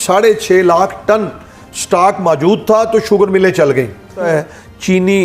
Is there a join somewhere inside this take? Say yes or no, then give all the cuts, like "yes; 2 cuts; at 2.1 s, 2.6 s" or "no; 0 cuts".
yes; 1 cut; at 4.2 s